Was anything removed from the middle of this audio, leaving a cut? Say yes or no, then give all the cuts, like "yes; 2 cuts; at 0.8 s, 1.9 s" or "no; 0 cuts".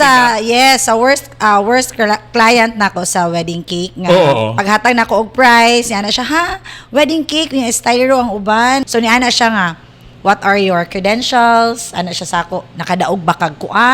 yes; 1 cut; at 8.9 s